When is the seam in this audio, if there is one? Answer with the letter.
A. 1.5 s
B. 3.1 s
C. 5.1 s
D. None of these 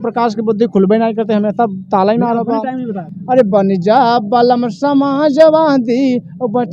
B